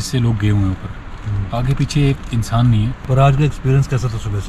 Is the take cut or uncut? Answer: uncut